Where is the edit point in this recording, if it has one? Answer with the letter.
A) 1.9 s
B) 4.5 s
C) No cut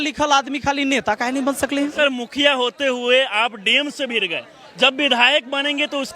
A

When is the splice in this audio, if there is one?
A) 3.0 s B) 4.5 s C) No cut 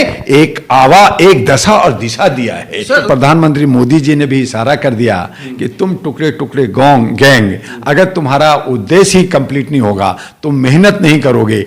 A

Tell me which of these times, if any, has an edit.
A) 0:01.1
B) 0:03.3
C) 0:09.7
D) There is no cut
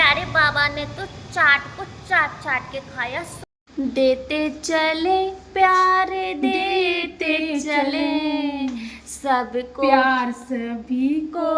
B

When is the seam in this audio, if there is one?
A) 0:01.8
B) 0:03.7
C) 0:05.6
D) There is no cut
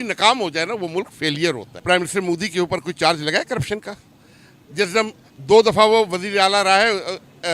A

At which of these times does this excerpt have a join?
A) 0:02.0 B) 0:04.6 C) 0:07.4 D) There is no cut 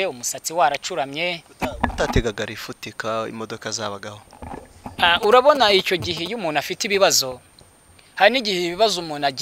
D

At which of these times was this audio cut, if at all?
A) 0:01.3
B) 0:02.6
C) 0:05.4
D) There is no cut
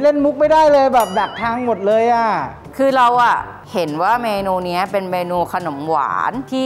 D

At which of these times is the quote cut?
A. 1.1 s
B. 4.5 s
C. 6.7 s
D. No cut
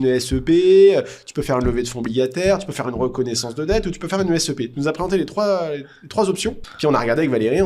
C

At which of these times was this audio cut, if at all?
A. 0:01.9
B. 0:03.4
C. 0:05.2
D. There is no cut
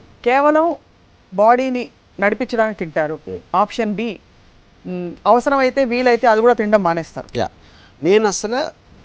D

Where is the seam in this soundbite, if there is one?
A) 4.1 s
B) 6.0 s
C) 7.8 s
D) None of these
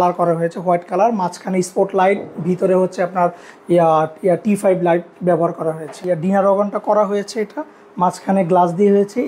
B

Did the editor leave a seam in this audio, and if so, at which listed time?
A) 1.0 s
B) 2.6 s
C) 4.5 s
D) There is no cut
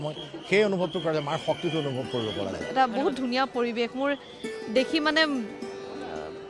B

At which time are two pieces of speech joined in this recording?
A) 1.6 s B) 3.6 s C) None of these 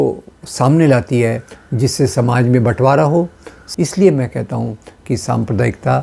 B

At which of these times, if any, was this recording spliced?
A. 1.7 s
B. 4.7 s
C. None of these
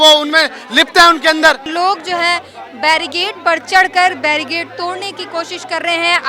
A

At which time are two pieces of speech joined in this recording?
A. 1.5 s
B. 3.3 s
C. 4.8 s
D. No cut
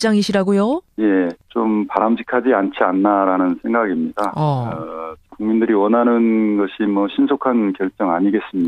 B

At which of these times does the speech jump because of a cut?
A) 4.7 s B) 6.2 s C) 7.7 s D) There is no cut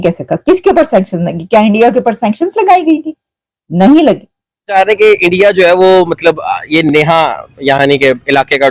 A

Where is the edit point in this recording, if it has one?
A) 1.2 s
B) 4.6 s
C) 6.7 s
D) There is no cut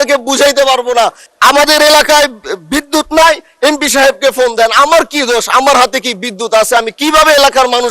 A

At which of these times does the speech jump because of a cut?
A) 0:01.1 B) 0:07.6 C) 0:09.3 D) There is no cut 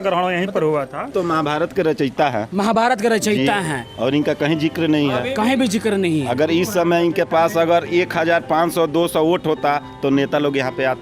A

